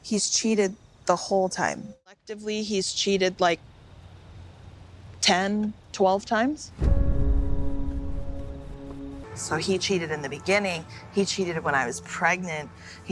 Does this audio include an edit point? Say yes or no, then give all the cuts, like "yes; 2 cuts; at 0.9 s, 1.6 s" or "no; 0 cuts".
yes; 2 cuts; at 2.1 s, 8.7 s